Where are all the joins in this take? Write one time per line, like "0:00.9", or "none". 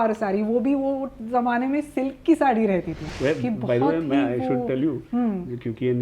0:03.1